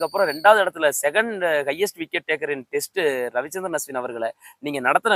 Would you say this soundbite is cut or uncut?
uncut